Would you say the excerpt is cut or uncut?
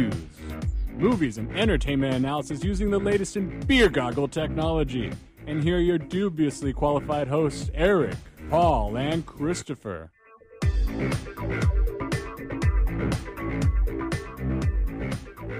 cut